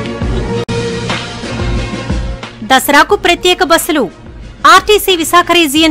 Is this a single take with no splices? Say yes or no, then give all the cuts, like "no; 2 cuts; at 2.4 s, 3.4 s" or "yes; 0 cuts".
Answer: no; 1 cut; at 2.3 s